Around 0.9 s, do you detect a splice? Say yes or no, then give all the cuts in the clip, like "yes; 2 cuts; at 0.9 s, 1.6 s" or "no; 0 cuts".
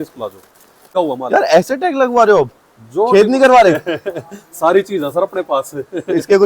yes; 1 cut; at 0.9 s